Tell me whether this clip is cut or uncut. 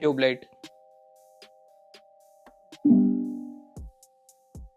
cut